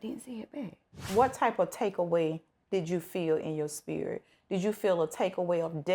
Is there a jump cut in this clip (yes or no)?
yes